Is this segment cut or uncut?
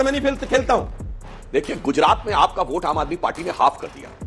cut